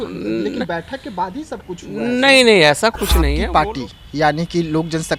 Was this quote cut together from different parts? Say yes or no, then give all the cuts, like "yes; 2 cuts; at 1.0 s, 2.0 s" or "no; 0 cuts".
yes; 1 cut; at 3.4 s